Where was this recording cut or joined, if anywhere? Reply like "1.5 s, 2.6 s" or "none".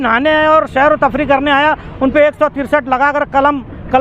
none

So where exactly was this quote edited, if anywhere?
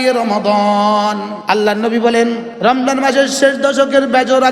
1.3 s, 2.5 s

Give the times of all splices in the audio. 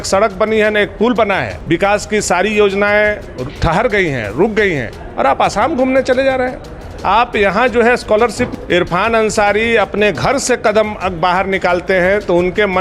1.5 s, 8.5 s

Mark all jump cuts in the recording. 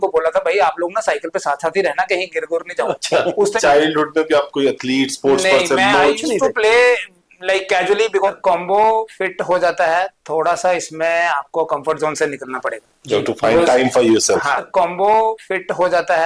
3.6 s, 8.3 s, 14.6 s

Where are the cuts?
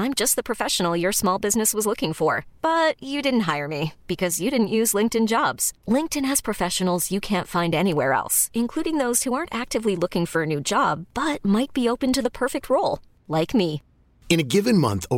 none

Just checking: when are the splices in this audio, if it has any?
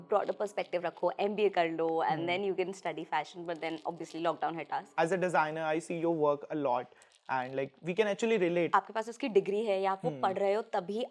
4.9 s, 8.7 s

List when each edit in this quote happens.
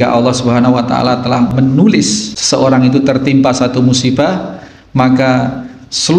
1.5 s, 2.3 s

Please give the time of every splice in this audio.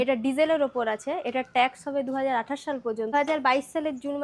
3.1 s

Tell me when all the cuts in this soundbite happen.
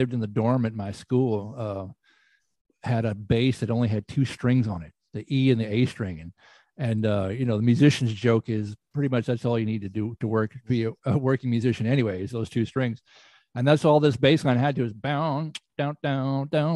none

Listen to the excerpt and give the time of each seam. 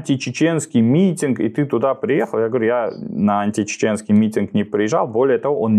none

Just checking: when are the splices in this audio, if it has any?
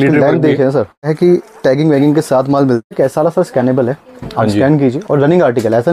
1.1 s, 2.9 s

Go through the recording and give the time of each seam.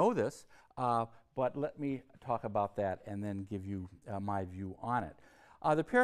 3.9 s

